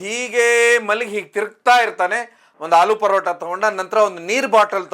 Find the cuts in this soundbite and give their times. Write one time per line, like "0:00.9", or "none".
0:02.4